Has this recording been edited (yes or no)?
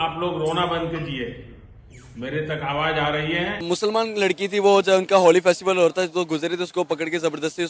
yes